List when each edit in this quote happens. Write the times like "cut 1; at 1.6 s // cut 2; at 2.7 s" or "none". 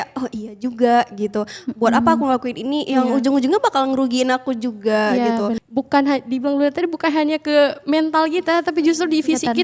cut 1; at 5.6 s